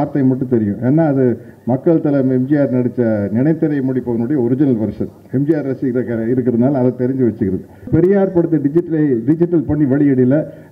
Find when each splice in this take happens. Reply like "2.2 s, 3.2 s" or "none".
7.9 s